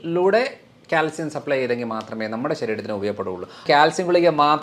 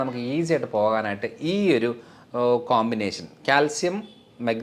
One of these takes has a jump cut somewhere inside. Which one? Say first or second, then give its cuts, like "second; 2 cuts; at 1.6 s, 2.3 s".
first; 1 cut; at 3.6 s